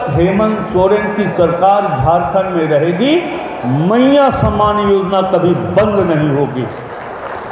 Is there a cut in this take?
no; 0 cuts

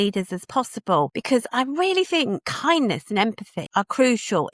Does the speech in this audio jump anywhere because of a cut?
yes; 3 cuts; at 1.2 s, 2.5 s, 3.5 s

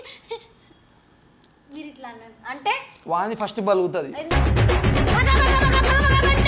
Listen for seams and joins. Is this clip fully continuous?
yes; 0 cuts

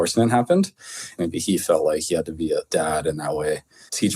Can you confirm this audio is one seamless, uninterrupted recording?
no; 2 cuts; at 1.1 s, 2.7 s

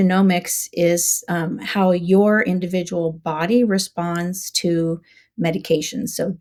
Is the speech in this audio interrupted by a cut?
no; 0 cuts

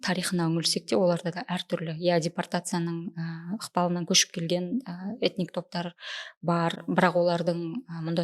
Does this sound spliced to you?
no; 0 cuts

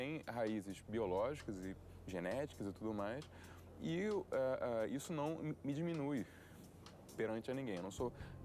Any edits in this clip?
no; 0 cuts

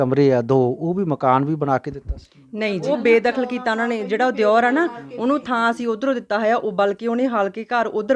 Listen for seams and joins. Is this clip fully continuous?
no; 1 cut; at 2.9 s

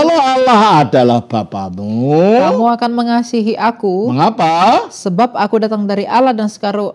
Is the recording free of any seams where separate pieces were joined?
yes; 0 cuts

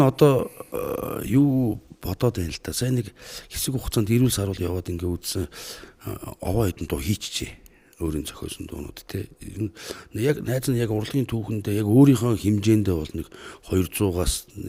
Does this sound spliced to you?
no; 0 cuts

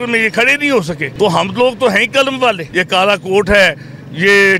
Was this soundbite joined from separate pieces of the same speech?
yes; 2 cuts; at 1.0 s, 2.7 s

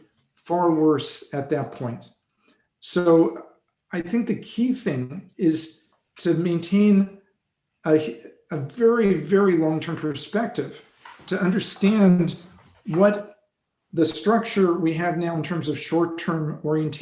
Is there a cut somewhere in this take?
no; 0 cuts

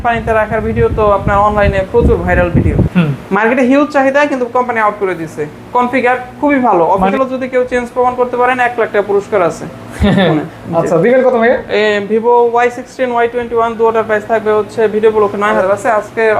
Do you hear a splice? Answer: yes; 3 cuts; at 2.9 s, 7.1 s, 15.6 s

